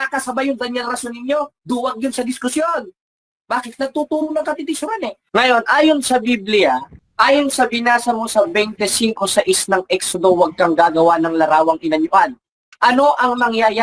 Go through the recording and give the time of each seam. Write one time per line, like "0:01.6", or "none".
0:05.2
0:07.0